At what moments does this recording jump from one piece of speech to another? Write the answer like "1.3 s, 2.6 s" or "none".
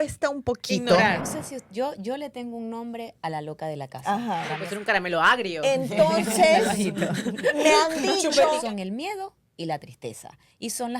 1.3 s, 4.6 s, 8.6 s